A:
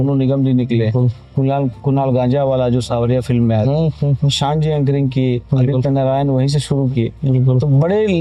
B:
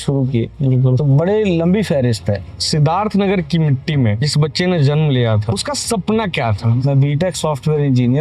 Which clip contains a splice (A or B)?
B